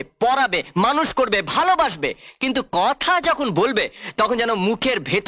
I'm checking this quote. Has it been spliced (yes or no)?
no